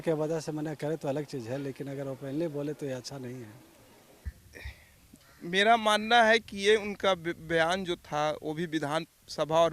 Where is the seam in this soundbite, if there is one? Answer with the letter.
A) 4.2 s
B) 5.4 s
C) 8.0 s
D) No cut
A